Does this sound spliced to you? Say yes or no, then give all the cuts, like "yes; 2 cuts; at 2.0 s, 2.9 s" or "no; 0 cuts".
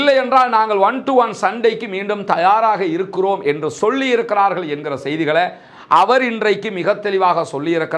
no; 0 cuts